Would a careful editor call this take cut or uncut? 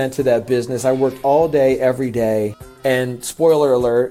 cut